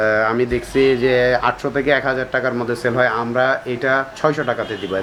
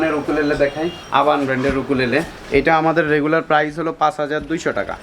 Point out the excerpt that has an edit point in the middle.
second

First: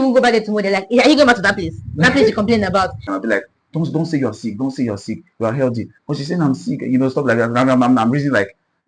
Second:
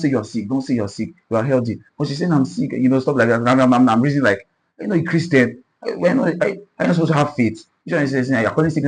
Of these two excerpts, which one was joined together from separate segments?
first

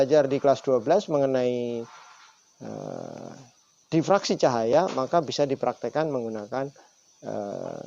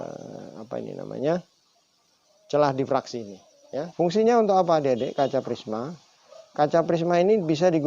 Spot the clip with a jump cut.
second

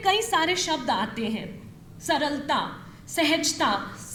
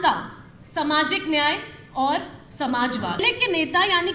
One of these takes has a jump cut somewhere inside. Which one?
second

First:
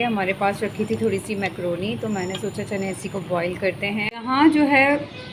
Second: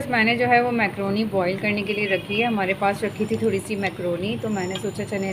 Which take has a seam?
first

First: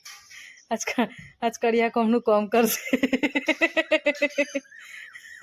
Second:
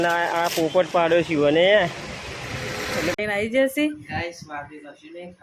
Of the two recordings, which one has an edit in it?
second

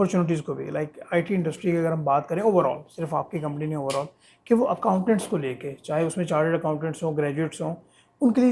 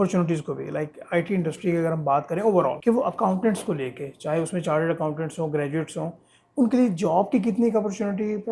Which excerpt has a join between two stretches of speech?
second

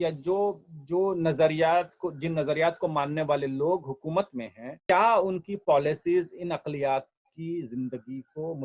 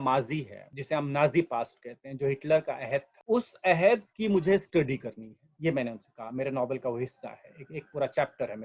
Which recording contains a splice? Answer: second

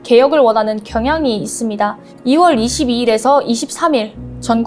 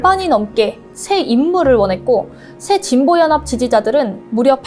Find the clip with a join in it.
first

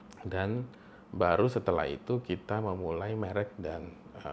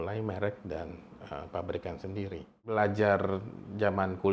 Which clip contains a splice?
second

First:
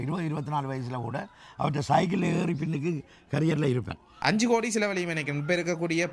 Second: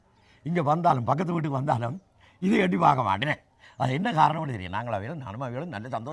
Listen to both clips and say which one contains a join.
first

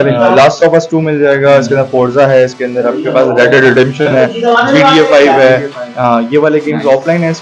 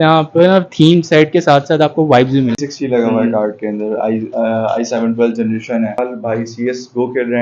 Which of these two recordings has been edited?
second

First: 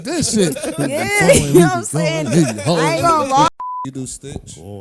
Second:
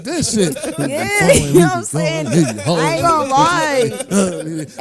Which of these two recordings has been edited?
first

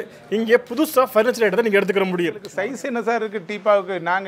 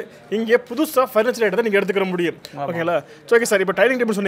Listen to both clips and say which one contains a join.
first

